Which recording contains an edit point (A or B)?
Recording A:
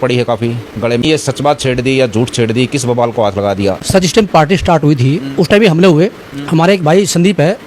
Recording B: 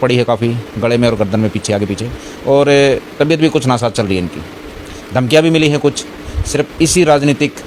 A